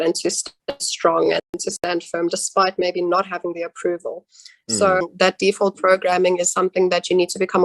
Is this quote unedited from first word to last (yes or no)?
no